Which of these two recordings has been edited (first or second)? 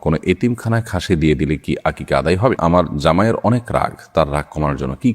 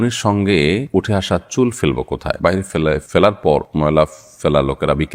first